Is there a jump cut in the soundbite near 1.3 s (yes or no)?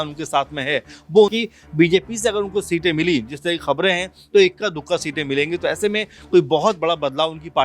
yes